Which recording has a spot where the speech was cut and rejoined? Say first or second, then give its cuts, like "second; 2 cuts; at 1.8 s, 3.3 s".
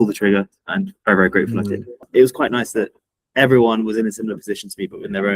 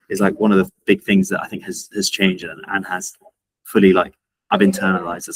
first; 2 cuts; at 0.9 s, 2.1 s